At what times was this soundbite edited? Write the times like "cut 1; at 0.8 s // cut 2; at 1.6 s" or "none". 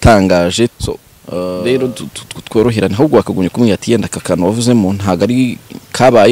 cut 1; at 1.1 s